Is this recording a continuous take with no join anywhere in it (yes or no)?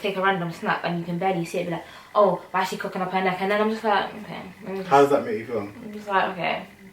yes